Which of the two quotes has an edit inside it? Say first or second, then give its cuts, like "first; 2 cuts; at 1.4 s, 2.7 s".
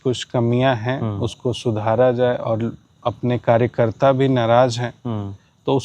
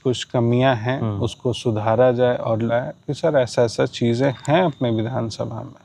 second; 1 cut; at 2.7 s